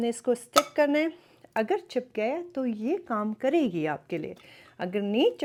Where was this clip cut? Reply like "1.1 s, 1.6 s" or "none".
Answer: none

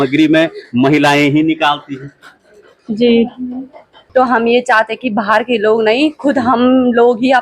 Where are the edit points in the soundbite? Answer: 3.9 s

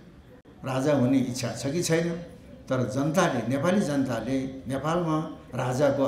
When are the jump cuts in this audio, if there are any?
none

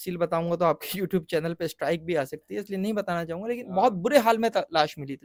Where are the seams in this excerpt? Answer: none

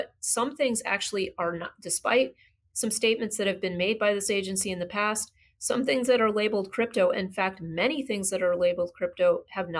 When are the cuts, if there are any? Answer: none

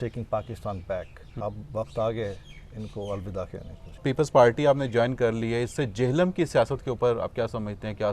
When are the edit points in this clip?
1.3 s, 4.0 s

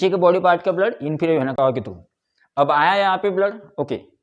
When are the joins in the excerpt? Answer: none

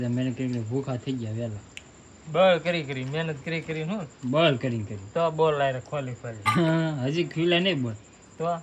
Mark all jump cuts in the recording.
none

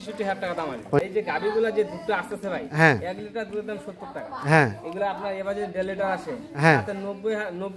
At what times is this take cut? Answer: 1.0 s

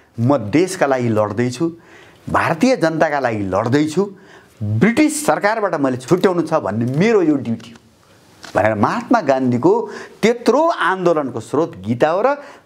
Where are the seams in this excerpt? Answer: 6.0 s

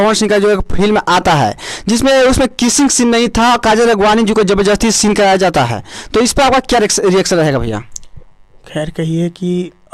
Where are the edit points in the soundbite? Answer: none

